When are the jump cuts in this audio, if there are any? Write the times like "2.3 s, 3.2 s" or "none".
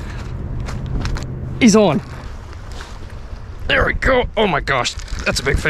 1.1 s, 2.1 s